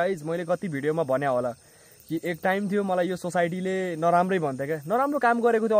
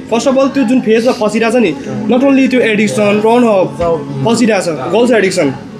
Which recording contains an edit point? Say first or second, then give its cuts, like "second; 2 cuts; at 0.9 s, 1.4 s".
second; 2 cuts; at 3.2 s, 4.9 s